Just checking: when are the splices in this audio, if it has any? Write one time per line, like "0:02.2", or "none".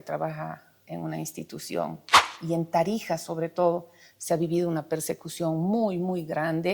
0:02.4